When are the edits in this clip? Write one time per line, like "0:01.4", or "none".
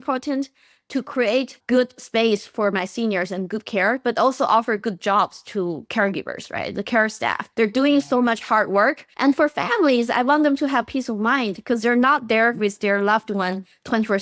0:01.6
0:07.4
0:09.1

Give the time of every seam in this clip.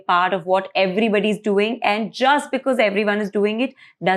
none

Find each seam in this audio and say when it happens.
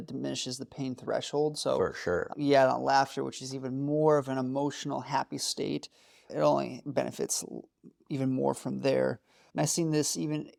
none

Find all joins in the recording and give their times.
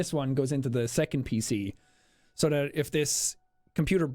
0:01.2

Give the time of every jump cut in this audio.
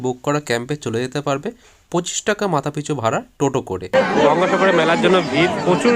0:03.9

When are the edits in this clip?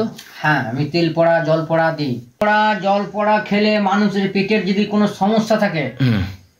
0:02.4

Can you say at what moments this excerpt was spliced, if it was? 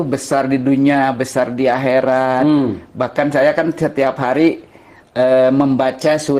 none

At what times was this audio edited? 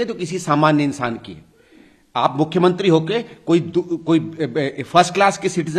none

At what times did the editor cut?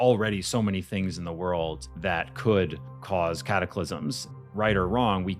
0:01.9
0:04.3

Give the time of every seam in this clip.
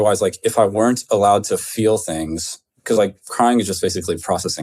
none

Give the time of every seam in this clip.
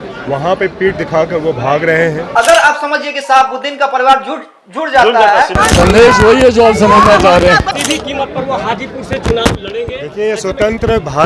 0:02.3
0:05.5
0:07.7

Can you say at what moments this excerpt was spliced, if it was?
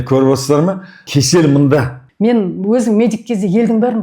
0:01.1
0:02.0

